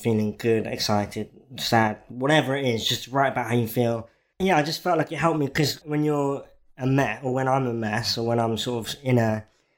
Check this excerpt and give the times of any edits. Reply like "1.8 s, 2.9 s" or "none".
4.3 s, 5.8 s